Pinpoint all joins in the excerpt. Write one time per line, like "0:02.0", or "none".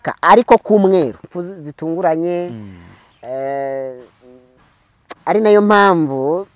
0:01.3